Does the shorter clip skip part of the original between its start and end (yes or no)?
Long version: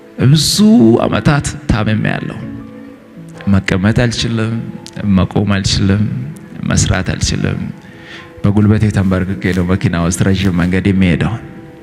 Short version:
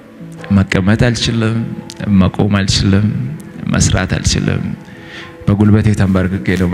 no